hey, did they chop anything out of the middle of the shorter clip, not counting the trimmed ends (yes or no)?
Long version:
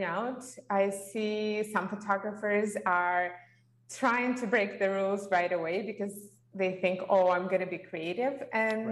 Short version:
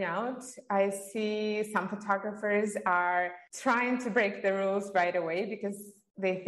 yes